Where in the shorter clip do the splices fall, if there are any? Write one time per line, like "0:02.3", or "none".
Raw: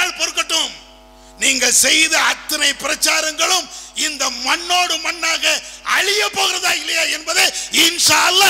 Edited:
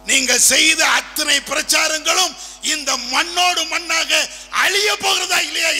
none